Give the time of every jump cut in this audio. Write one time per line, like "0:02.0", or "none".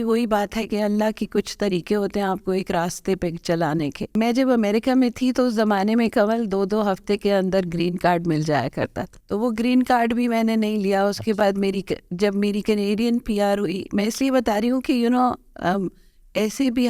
0:04.1
0:09.1